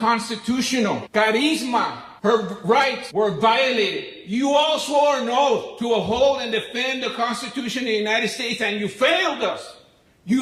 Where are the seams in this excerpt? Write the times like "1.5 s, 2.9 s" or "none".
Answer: none